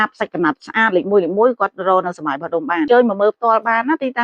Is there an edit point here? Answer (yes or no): yes